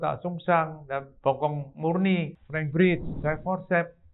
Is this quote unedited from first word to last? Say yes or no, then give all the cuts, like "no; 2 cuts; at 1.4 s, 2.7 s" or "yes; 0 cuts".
no; 2 cuts; at 2.4 s, 3.1 s